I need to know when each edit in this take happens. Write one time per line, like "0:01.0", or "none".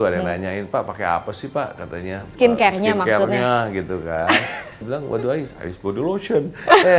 0:04.8